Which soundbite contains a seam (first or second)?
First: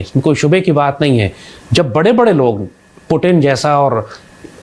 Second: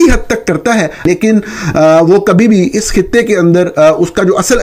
second